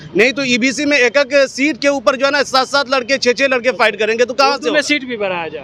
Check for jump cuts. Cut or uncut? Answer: uncut